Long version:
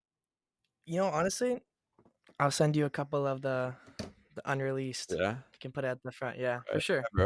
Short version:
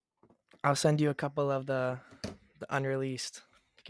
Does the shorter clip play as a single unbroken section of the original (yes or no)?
yes